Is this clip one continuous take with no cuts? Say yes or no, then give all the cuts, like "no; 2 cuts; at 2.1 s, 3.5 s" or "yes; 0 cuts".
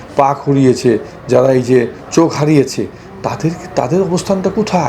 yes; 0 cuts